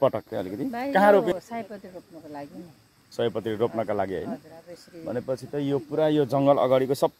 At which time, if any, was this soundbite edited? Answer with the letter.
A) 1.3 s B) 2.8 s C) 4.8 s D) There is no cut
A